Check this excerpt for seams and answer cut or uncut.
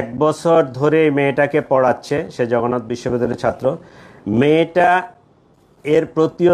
uncut